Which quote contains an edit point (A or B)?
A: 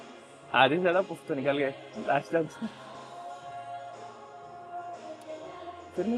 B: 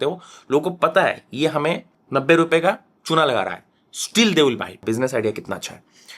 B